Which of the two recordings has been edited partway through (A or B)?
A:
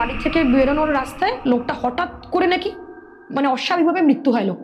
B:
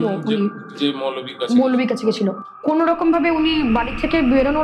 B